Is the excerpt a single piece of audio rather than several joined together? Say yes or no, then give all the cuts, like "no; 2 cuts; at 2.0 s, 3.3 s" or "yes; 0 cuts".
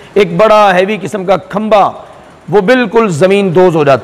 yes; 0 cuts